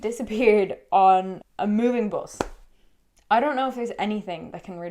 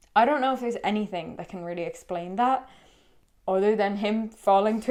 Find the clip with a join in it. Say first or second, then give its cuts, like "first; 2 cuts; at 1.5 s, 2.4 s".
first; 1 cut; at 1.4 s